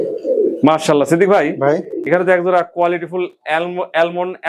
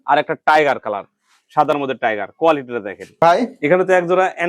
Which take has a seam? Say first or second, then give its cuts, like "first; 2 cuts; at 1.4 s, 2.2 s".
second; 1 cut; at 3.2 s